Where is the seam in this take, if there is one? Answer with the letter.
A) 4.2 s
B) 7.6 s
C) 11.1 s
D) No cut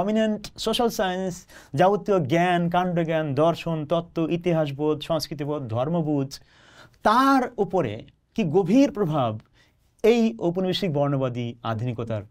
D